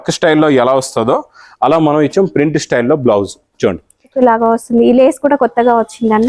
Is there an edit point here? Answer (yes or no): yes